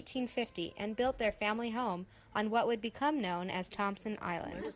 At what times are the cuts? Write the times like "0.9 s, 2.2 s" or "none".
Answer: none